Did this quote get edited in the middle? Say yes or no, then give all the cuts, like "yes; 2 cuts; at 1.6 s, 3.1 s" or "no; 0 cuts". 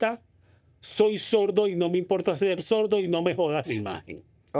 no; 0 cuts